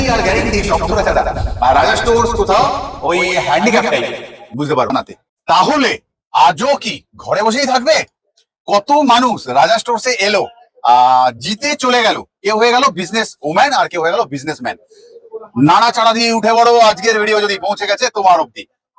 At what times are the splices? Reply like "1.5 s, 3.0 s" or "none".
4.9 s